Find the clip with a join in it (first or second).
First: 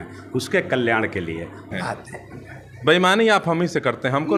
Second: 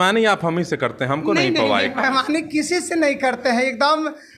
first